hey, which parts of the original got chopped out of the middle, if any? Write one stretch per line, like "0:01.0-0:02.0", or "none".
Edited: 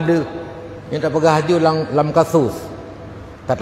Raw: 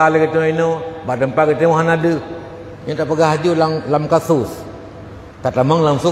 none